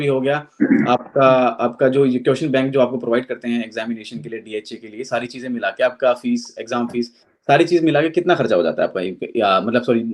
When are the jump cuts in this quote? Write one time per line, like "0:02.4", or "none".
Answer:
none